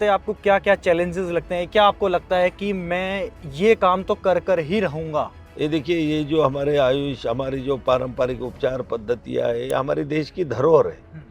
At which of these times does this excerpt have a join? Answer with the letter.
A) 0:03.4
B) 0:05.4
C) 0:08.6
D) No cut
B